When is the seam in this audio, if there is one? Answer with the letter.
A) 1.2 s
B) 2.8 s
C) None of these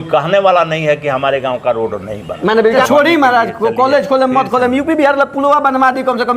B